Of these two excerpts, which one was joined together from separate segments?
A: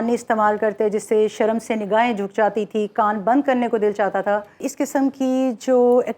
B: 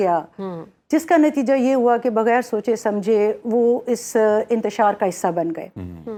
A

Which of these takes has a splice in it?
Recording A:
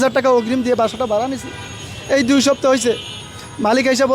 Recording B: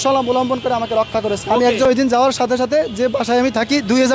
B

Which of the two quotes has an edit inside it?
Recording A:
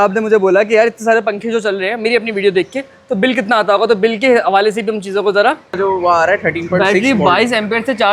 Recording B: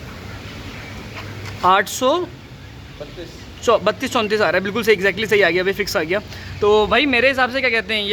A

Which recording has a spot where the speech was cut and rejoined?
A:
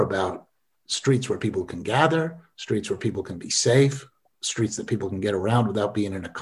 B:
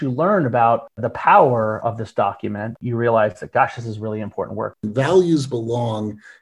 B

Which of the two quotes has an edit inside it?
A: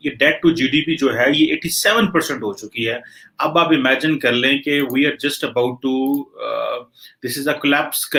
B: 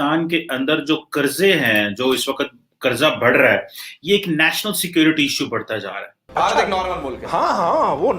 B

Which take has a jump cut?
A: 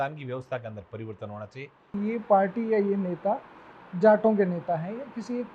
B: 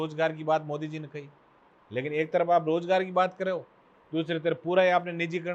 A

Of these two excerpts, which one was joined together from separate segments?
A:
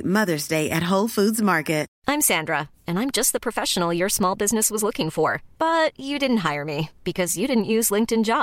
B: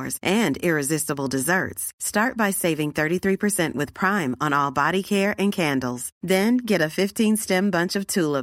A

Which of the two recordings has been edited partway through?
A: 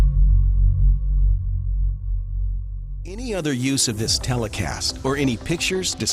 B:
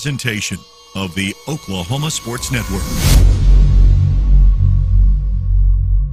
A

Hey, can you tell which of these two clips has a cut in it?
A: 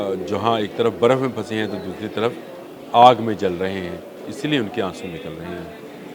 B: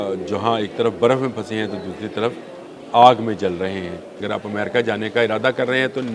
B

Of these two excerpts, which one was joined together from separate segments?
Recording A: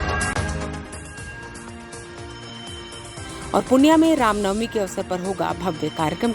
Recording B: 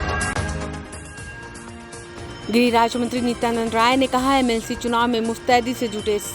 A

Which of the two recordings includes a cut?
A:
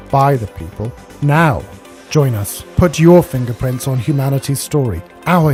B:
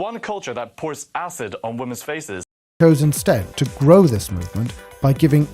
B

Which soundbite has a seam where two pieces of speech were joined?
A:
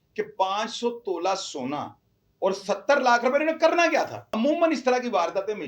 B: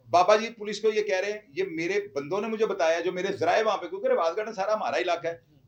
A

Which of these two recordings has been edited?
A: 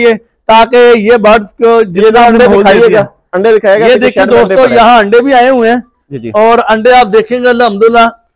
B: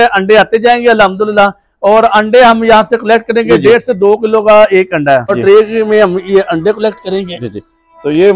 B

